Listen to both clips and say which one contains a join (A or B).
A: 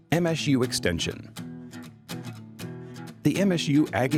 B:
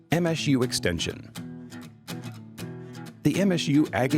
B